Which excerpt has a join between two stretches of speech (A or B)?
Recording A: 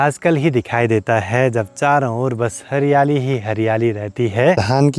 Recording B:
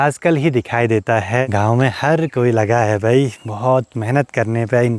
B